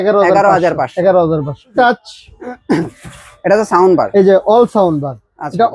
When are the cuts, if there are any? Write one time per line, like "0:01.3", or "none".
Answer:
0:01.7